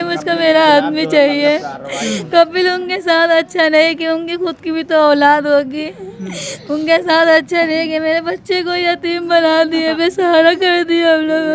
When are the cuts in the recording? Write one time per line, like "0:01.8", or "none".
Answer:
none